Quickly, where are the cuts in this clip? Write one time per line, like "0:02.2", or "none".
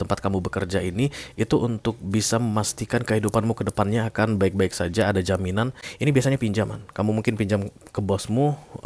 0:05.8